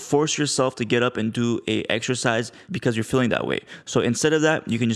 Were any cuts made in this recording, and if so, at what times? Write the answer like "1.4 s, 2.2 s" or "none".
2.6 s